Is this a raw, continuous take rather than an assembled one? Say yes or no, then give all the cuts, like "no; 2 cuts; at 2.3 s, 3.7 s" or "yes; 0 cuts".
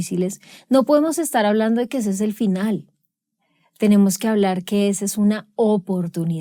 yes; 0 cuts